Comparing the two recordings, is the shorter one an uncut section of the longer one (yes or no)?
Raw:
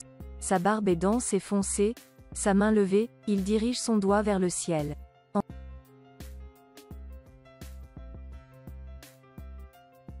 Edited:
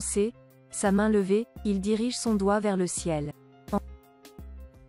no